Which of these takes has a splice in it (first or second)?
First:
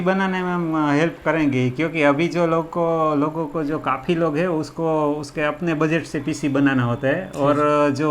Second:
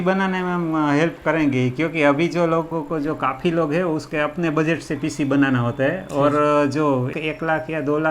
second